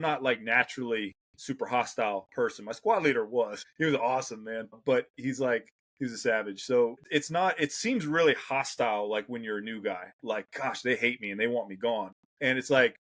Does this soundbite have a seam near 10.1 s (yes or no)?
no